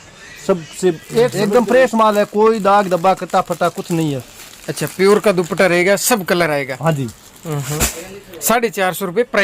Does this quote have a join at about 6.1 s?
no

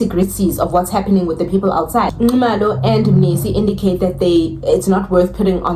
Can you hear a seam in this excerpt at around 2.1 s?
no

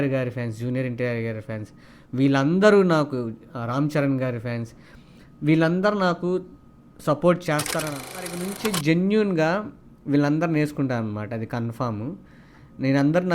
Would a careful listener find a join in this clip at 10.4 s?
no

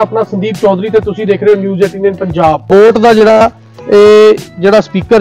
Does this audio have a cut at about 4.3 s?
no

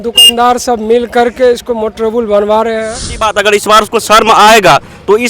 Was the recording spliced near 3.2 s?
yes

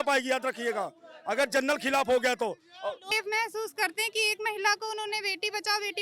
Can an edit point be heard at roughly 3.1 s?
yes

